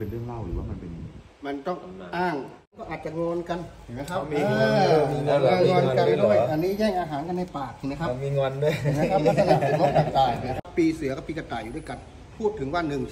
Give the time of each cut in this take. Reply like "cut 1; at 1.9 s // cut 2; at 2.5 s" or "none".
cut 1; at 2.8 s // cut 2; at 10.6 s